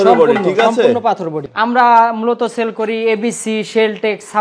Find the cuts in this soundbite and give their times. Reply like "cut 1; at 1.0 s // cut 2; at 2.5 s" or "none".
cut 1; at 1.4 s